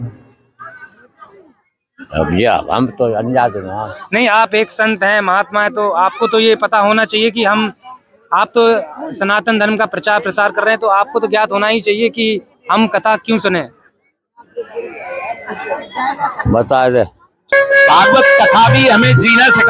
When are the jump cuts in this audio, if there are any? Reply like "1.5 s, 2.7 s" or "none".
17.5 s